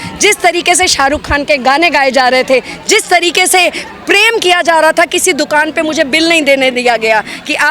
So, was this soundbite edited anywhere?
no; 0 cuts

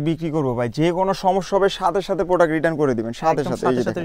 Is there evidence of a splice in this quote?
no; 0 cuts

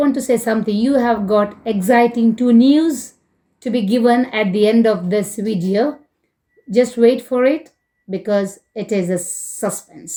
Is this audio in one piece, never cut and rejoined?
yes; 0 cuts

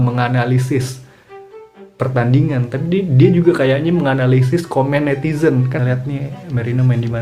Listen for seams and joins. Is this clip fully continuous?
no; 1 cut; at 5.8 s

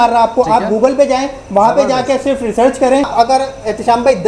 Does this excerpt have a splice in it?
yes; 1 cut; at 3.1 s

